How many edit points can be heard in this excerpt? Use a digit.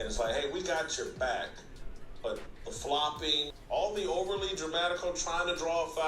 1